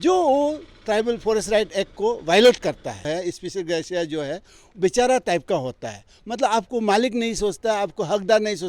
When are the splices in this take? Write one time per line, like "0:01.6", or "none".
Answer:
0:03.1